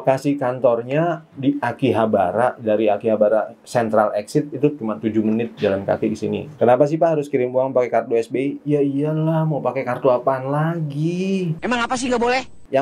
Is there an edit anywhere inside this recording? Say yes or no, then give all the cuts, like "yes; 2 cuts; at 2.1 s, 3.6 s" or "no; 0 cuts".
yes; 2 cuts; at 6.5 s, 11.5 s